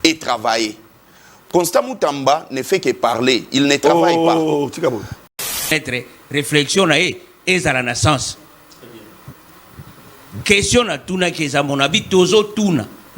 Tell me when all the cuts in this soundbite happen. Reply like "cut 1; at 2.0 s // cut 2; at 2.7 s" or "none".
cut 1; at 5.4 s